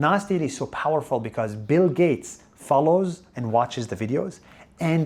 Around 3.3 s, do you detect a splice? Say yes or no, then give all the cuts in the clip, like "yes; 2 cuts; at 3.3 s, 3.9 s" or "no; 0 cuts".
no; 0 cuts